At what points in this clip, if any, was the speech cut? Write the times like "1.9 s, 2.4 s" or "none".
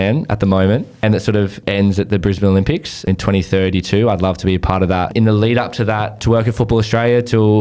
1.4 s, 3.1 s, 5.1 s, 6.2 s